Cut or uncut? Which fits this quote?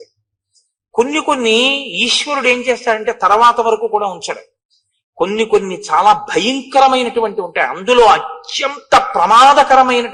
uncut